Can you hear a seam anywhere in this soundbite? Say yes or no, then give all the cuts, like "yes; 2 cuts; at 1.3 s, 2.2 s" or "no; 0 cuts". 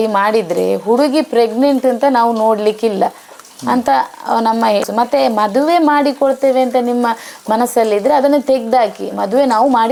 no; 0 cuts